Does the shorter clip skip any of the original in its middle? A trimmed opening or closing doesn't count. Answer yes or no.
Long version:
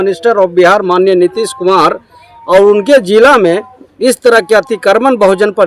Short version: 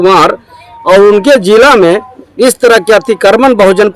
no